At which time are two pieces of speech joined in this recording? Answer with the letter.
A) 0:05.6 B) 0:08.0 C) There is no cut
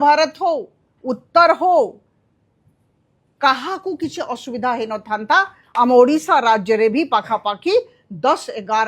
A